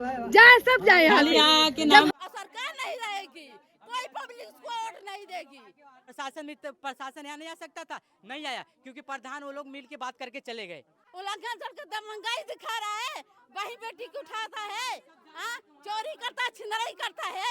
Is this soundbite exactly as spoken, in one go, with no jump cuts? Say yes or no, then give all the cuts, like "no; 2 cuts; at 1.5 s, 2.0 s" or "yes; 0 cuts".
no; 3 cuts; at 2.1 s, 6.1 s, 11.1 s